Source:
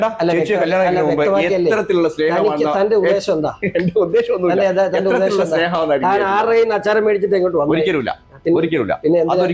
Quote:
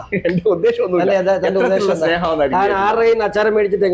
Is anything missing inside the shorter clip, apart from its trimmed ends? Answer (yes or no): no